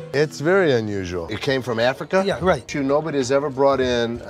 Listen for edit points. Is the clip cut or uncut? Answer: cut